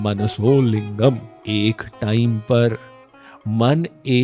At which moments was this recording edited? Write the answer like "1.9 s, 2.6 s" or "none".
1.3 s